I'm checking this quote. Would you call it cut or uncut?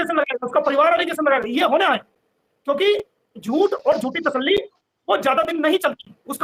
uncut